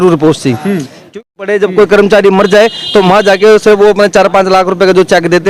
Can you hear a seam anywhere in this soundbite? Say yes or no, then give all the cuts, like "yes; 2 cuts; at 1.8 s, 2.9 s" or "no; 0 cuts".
yes; 1 cut; at 1.2 s